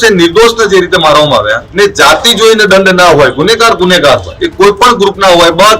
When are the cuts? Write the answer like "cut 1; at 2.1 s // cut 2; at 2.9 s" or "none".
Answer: cut 1; at 1.6 s // cut 2; at 4.4 s